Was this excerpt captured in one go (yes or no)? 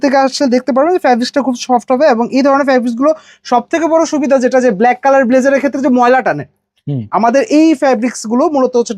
yes